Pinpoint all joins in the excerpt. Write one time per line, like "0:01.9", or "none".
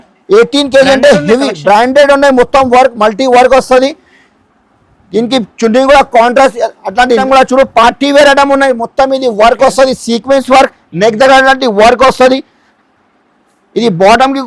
0:07.2